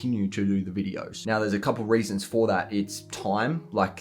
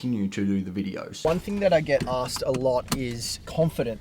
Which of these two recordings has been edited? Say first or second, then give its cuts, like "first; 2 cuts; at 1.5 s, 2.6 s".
second; 1 cut; at 1.2 s